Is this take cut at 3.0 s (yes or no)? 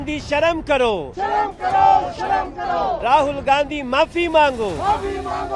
yes